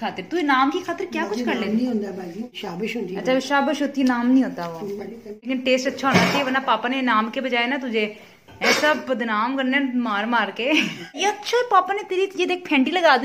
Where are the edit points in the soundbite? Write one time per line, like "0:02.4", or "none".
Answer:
0:02.6
0:05.4
0:11.2